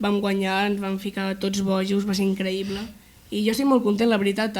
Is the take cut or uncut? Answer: uncut